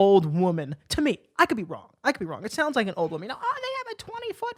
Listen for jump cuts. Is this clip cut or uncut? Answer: uncut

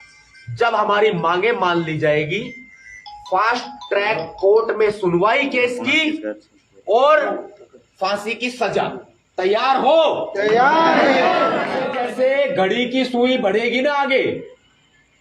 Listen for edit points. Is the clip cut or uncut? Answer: cut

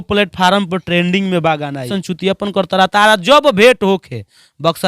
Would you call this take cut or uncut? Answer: cut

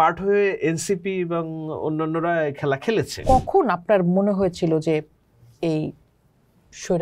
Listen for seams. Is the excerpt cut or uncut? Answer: cut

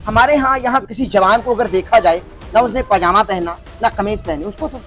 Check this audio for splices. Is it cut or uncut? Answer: uncut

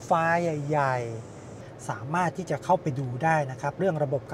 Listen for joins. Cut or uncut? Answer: cut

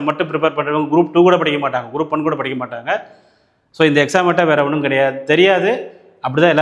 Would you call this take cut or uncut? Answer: uncut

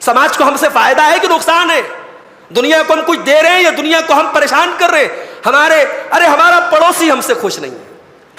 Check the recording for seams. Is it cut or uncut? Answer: uncut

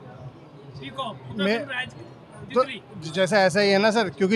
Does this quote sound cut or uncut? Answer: uncut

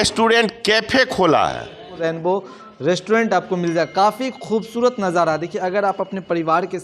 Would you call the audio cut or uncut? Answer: cut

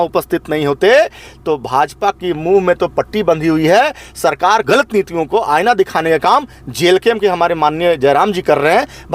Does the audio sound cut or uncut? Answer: cut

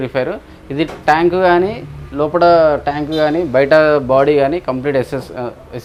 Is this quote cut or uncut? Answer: uncut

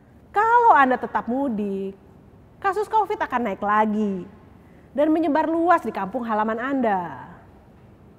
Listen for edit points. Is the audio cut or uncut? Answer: uncut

